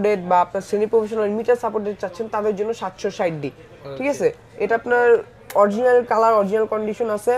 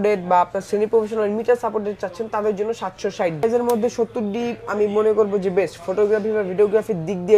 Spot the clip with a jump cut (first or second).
second